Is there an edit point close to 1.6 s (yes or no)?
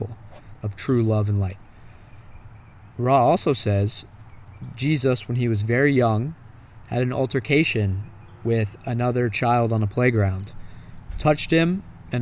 no